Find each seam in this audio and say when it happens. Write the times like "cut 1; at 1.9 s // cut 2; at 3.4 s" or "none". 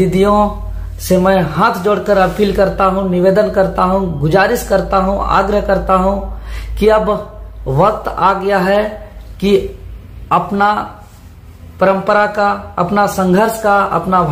none